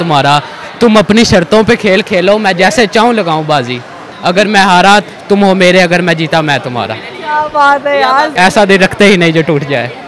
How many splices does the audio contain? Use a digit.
2